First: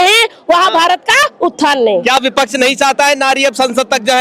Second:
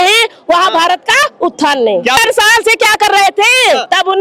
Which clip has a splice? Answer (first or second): second